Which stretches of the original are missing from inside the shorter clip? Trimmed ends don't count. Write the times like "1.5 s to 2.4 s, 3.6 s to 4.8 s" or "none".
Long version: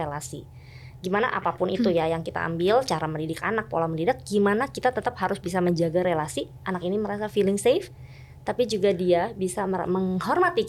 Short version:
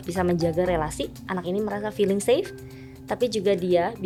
none